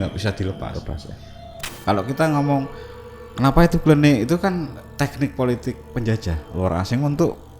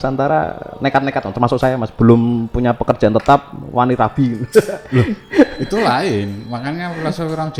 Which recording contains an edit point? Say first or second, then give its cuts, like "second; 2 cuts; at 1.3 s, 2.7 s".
first; 1 cut; at 1.6 s